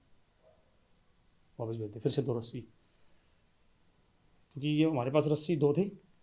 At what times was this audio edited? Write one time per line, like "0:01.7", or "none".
none